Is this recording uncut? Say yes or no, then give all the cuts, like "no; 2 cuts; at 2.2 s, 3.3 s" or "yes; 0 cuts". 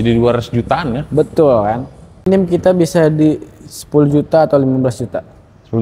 no; 1 cut; at 2.3 s